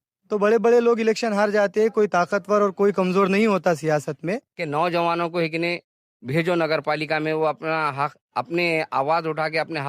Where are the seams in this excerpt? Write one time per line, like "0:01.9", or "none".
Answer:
0:04.5